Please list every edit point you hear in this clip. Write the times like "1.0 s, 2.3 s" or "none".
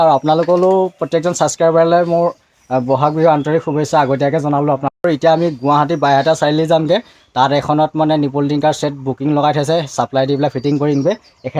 5.0 s